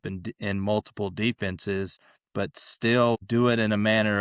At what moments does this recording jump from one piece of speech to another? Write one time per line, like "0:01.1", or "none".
0:03.2